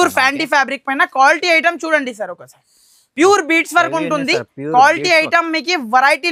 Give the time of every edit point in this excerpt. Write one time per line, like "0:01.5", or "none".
none